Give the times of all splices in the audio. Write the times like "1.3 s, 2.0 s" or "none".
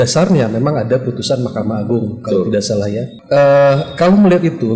3.1 s